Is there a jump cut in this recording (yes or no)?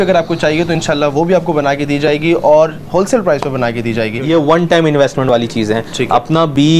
yes